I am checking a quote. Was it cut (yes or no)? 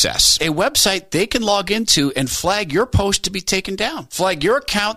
no